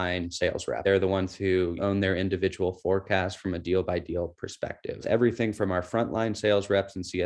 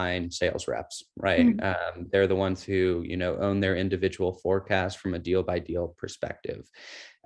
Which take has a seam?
first; 3 cuts; at 0.8 s, 1.8 s, 5.0 s

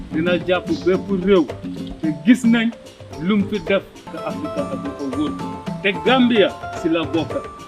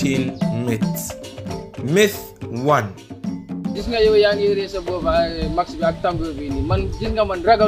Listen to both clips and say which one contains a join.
first; 1 cut; at 4.1 s

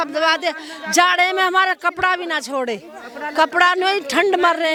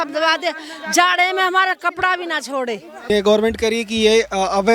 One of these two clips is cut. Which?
second; 1 cut; at 3.1 s

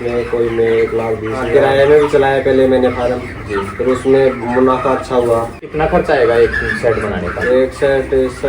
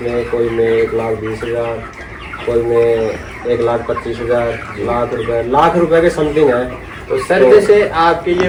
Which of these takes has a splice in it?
first; 2 cuts; at 1.5 s, 5.6 s

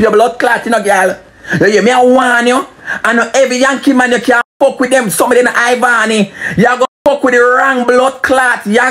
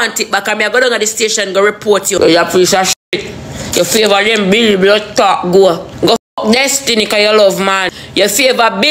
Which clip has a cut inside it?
second; 3 cuts; at 2.2 s, 5.9 s, 7.8 s

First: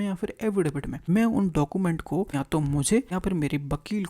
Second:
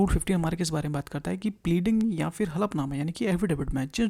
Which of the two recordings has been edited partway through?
first; 3 cuts; at 0.9 s, 2.3 s, 3.1 s

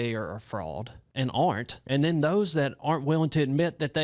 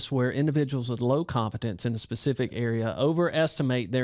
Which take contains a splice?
first; 2 cuts; at 1.0 s, 1.7 s

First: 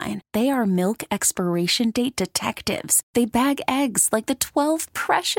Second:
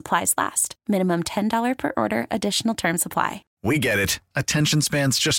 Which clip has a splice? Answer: second; 1 cut; at 3.5 s

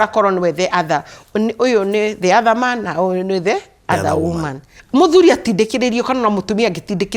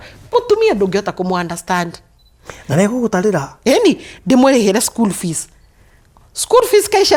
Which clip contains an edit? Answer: first; 1 cut; at 4.7 s

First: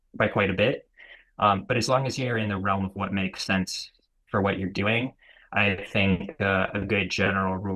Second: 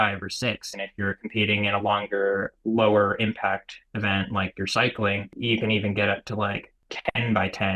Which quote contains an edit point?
second; 3 cuts; at 2.5 s, 5.3 s, 6.9 s

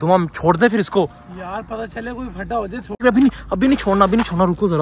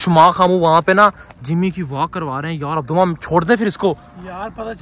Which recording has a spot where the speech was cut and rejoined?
first; 1 cut; at 3.0 s

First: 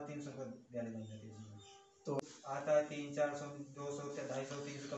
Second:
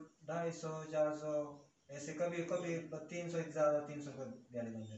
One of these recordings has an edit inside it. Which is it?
first; 1 cut; at 2.2 s

